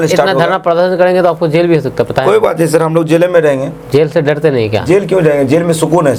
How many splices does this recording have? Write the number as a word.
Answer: zero